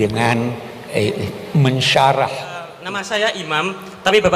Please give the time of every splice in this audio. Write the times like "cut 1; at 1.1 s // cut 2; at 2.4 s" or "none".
cut 1; at 2.8 s